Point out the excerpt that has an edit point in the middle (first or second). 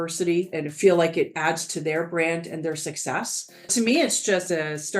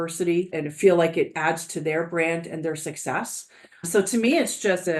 first